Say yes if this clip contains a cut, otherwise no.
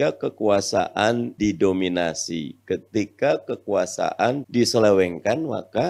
yes